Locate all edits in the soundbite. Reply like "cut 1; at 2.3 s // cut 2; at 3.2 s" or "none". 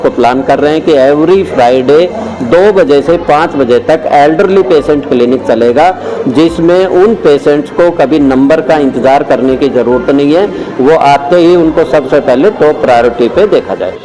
none